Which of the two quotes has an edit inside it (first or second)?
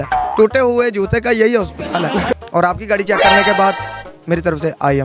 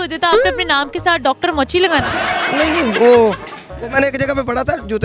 first